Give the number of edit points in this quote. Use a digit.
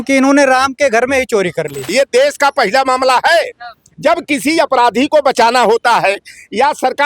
1